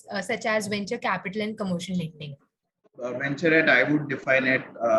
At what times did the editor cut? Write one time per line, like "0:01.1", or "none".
0:03.0